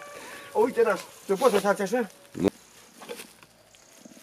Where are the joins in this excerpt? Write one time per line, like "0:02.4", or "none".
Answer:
0:02.5